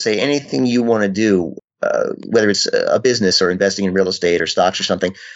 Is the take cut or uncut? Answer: uncut